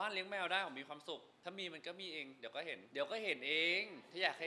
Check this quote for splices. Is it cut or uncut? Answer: cut